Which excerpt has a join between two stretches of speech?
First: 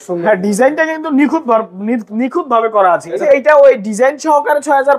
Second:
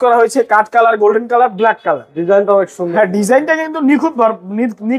first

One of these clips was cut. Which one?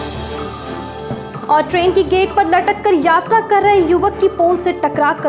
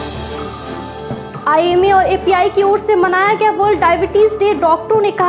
second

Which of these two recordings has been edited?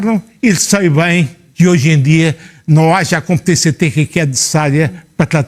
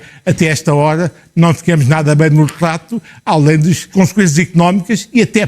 second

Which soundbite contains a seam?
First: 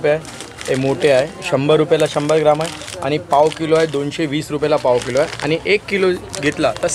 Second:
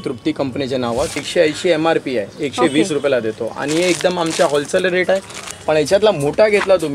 second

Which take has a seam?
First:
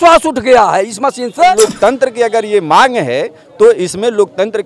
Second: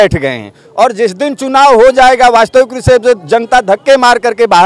first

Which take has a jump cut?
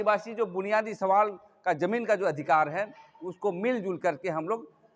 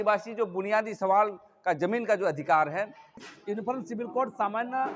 second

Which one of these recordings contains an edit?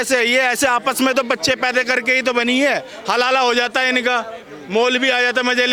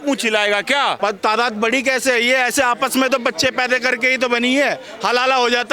second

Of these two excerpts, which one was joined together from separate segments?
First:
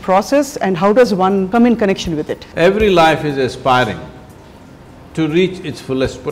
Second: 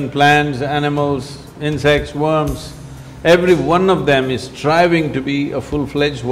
first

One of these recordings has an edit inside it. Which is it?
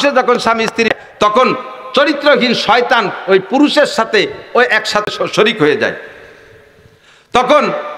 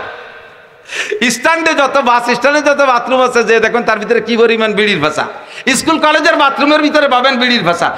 first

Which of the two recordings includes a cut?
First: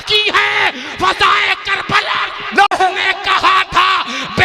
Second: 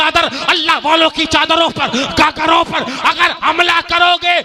first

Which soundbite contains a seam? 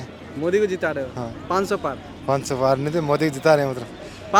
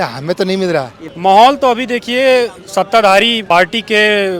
second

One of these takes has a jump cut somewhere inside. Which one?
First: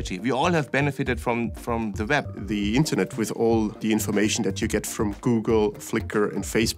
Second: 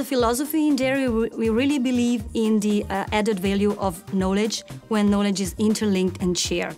first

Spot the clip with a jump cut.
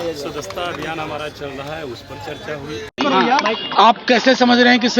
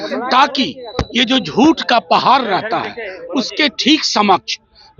first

